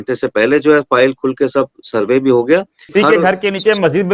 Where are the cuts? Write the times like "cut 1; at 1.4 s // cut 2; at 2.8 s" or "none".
cut 1; at 2.9 s